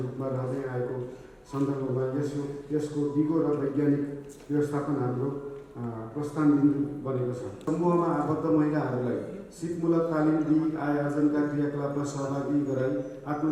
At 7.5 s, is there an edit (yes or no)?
yes